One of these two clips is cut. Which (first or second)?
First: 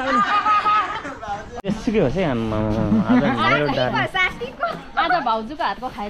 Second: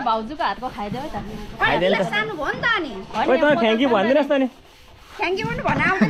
first